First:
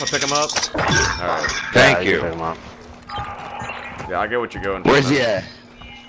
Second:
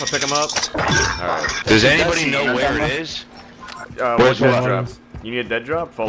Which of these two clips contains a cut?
second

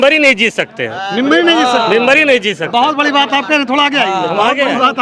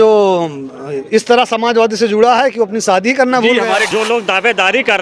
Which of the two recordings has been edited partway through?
second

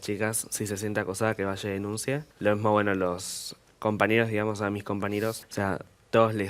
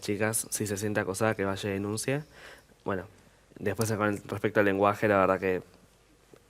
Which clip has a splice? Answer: first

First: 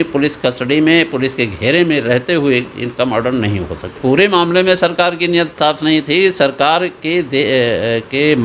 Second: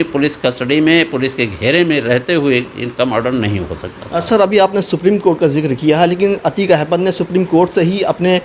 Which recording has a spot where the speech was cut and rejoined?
first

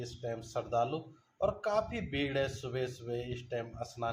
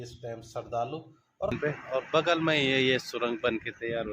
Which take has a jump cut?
second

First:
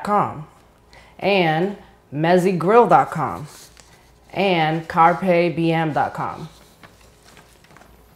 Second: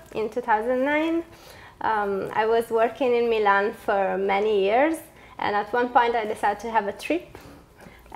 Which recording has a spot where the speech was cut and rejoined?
second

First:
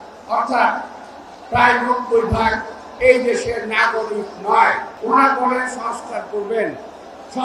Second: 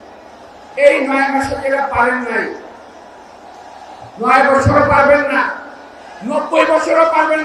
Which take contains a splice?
first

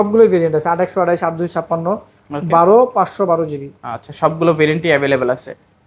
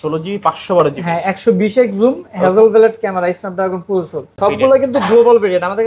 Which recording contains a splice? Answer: second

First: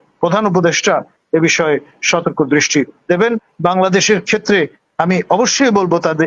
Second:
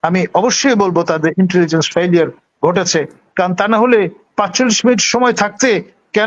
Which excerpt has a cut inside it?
first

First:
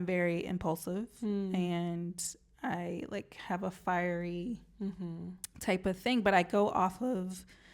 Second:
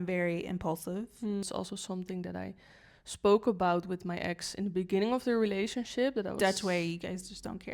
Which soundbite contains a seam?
second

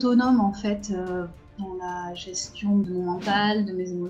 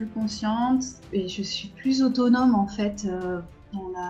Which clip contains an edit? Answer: first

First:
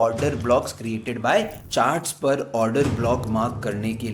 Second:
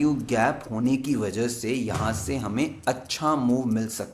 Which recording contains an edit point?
first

